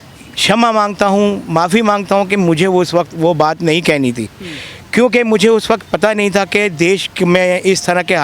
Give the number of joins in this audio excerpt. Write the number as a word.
zero